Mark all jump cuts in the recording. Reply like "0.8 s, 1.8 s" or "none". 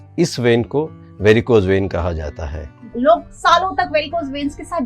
2.8 s